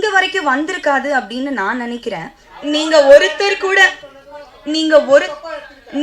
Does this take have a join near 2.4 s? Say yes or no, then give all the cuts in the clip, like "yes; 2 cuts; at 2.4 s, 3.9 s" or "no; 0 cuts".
yes; 1 cut; at 2.4 s